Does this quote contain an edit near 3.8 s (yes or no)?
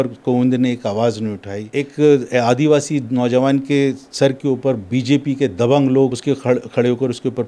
no